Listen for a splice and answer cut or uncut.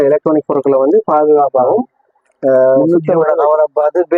uncut